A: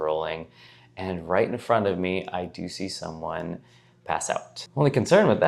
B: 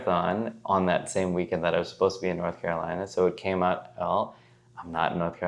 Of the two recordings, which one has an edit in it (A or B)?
A